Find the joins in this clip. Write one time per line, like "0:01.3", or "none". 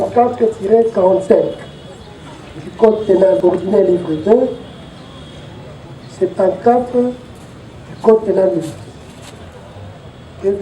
0:03.4

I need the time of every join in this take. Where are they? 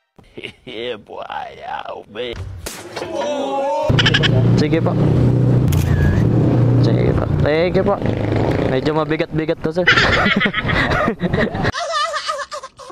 none

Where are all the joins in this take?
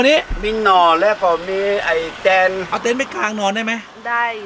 0:02.7

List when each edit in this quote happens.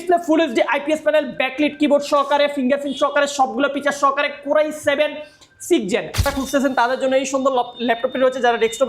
0:06.3

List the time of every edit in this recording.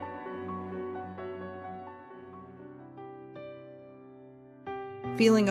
0:02.6

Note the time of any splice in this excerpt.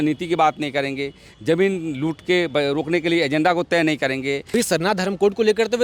0:04.5

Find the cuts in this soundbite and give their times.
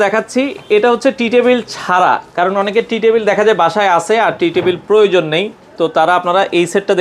none

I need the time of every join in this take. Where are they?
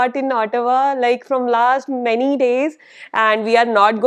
none

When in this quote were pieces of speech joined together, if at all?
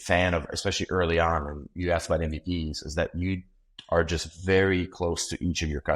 none

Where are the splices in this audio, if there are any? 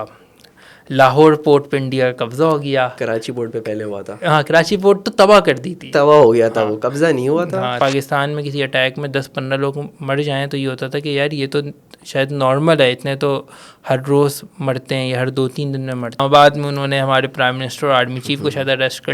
0:07.7
0:16.2

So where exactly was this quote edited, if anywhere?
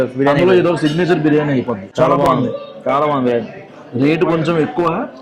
none

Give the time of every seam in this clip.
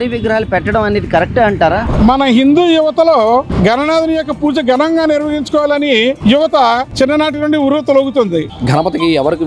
0:08.5

